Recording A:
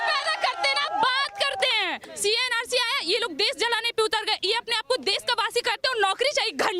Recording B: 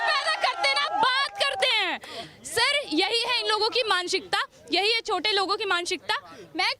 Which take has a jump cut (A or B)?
A